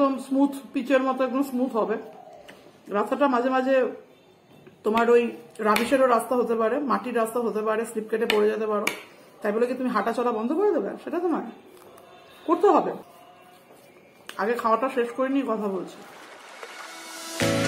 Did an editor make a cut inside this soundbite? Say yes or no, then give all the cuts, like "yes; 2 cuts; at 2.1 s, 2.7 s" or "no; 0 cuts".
no; 0 cuts